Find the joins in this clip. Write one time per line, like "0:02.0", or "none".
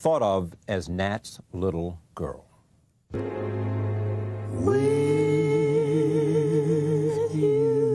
0:01.4